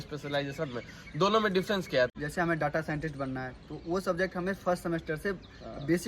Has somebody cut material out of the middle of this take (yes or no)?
yes